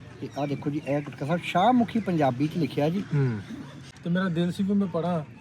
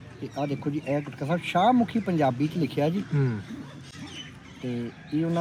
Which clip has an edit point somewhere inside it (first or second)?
first